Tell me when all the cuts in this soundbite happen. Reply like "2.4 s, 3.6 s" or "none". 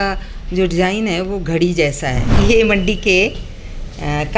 2.2 s